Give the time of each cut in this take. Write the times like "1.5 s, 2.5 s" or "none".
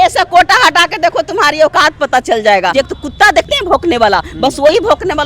2.7 s